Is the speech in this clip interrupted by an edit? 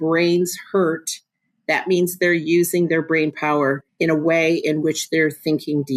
yes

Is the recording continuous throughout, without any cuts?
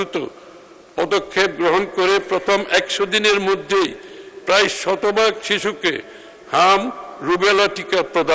yes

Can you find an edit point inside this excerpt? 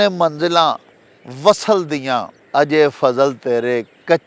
yes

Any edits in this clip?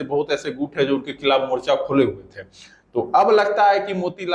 no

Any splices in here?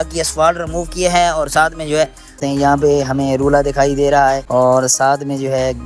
yes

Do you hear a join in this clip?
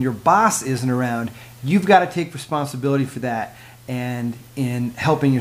no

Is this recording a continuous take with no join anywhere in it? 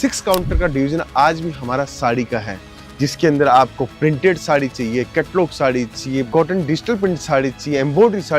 no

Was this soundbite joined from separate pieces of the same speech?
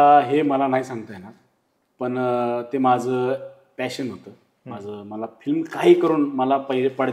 no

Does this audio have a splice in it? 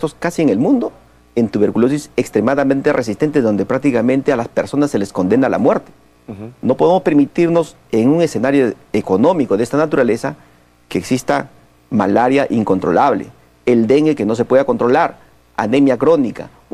yes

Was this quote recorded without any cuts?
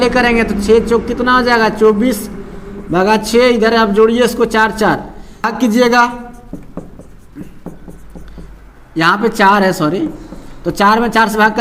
no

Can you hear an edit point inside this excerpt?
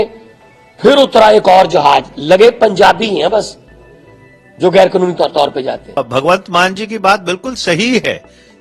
yes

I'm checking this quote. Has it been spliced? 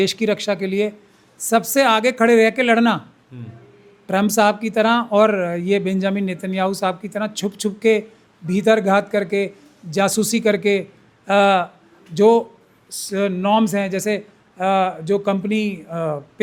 no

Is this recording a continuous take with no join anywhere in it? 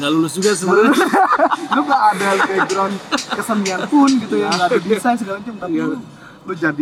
yes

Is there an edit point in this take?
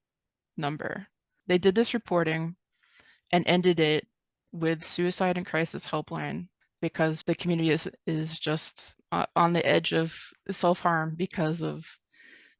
yes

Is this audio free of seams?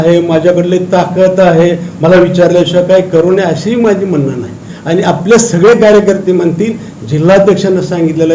no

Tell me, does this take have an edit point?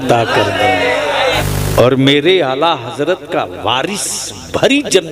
yes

